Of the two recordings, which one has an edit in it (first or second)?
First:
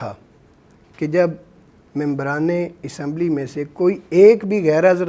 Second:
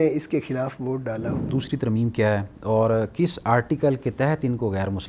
second